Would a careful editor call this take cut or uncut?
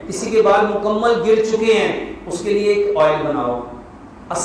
uncut